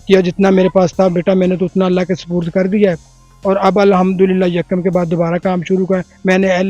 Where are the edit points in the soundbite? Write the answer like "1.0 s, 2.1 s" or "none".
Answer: none